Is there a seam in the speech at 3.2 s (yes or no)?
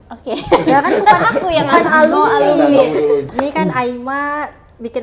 yes